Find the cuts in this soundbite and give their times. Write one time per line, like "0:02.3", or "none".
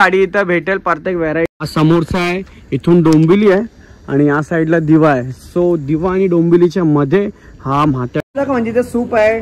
0:01.5
0:08.2